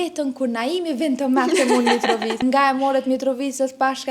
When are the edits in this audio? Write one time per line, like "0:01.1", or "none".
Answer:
0:02.4